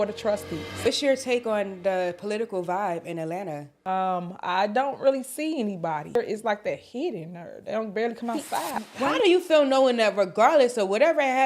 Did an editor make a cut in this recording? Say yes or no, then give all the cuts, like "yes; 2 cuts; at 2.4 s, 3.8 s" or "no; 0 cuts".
yes; 4 cuts; at 0.9 s, 3.7 s, 6.2 s, 8.7 s